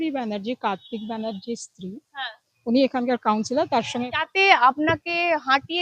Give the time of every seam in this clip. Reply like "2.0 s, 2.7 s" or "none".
4.1 s